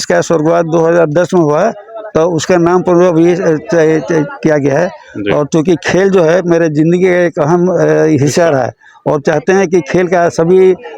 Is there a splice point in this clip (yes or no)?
no